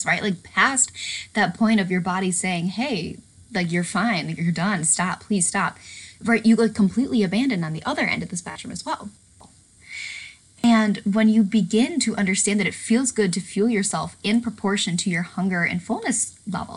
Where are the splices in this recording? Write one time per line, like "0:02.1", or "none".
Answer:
0:09.5